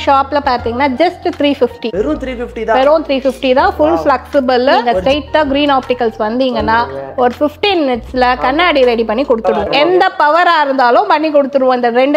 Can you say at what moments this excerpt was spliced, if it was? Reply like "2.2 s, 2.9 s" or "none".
4.9 s, 9.6 s